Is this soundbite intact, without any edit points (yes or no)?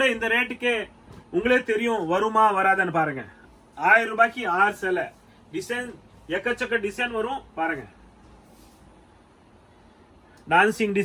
yes